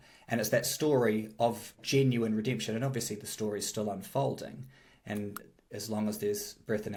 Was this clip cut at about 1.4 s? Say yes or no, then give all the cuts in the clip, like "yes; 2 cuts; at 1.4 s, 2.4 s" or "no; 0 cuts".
no; 0 cuts